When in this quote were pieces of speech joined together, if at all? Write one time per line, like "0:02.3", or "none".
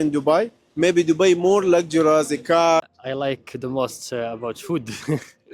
0:02.8